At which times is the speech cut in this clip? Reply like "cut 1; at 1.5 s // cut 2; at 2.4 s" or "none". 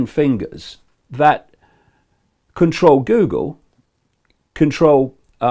cut 1; at 1.0 s

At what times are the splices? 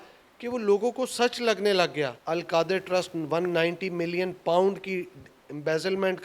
cut 1; at 2.2 s

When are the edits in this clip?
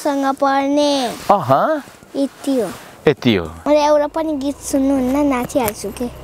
cut 1; at 3.5 s

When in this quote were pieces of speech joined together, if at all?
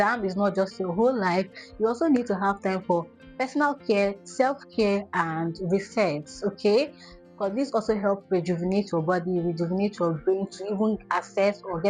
none

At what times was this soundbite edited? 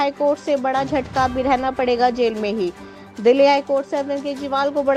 none

